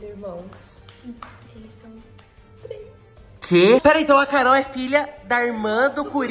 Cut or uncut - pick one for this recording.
cut